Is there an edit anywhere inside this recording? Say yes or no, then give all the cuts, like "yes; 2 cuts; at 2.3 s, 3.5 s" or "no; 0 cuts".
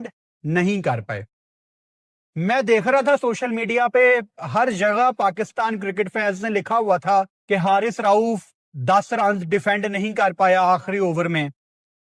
no; 0 cuts